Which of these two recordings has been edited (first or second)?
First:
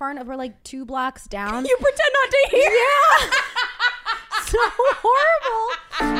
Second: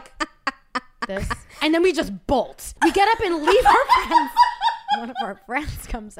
second